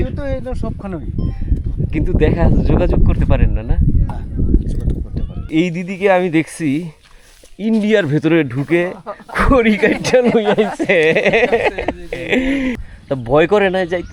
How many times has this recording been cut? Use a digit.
2